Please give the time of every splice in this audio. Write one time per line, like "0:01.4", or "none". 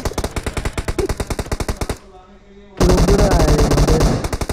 none

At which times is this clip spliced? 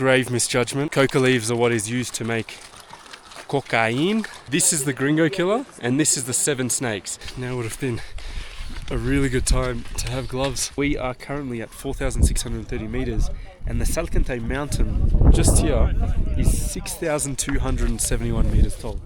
0:00.9
0:04.4
0:07.3
0:10.7

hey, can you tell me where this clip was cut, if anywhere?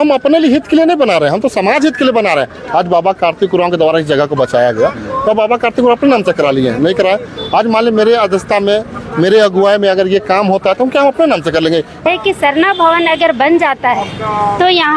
0:12.0

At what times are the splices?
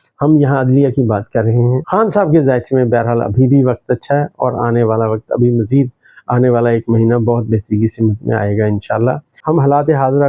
0:01.8
0:09.3

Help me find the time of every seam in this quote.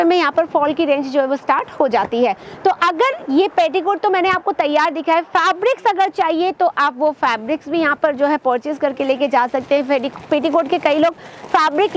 none

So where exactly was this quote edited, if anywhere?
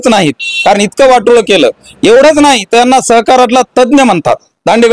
none

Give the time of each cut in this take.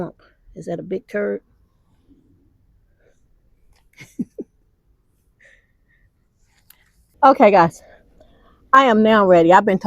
0:07.1

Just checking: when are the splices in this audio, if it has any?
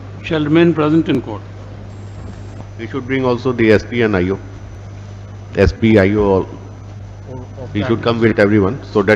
0:02.6

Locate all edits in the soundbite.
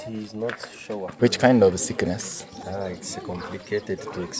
0:01.1
0:02.6

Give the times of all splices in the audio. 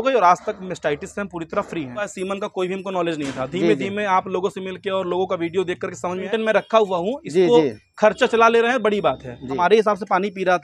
0:02.1
0:06.2
0:09.5

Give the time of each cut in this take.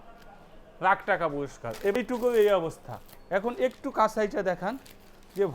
0:02.0

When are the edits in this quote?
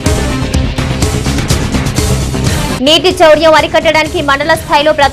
0:02.1

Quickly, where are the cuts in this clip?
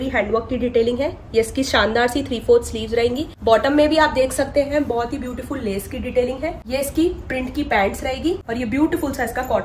0:03.3
0:06.6
0:08.5

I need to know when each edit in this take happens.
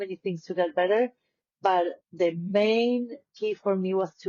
none

